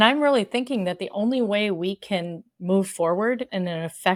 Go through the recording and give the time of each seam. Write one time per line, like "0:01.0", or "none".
none